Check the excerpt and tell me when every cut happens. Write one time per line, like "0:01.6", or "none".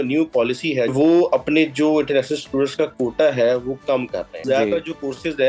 0:00.9
0:04.4